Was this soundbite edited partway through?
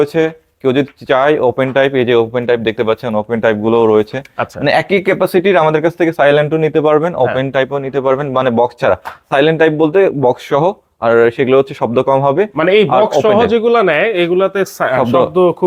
no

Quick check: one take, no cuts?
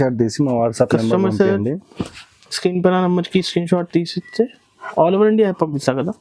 yes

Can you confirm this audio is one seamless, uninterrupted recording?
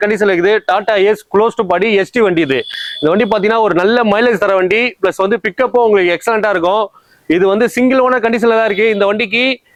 yes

